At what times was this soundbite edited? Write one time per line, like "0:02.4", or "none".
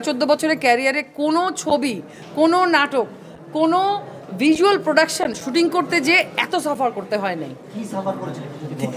none